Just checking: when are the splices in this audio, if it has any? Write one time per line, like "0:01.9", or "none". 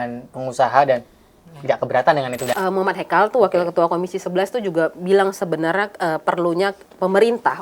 0:02.5